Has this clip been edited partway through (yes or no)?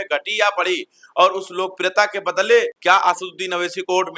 no